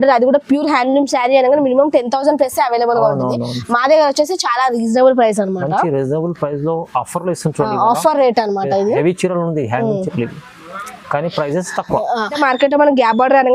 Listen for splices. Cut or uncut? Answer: cut